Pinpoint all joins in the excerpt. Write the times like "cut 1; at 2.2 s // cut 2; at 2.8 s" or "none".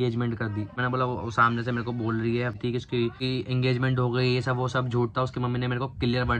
cut 1; at 2.6 s

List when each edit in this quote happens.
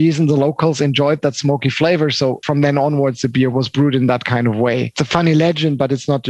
cut 1; at 2.4 s // cut 2; at 3.5 s // cut 3; at 5.0 s

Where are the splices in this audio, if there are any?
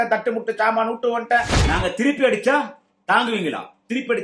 cut 1; at 1.5 s

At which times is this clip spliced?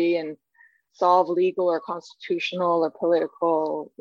none

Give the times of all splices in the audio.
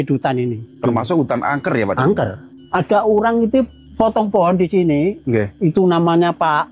none

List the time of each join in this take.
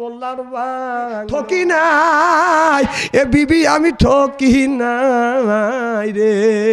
cut 1; at 1.3 s

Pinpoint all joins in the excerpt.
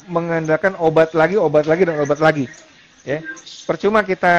none

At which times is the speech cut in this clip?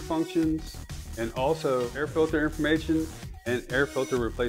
cut 1; at 2.0 s

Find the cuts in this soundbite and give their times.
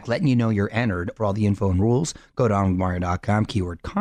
cut 1; at 1.1 s

